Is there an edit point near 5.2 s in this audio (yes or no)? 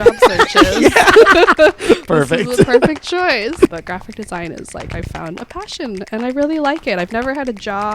no